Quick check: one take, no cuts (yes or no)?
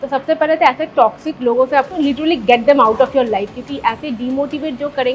no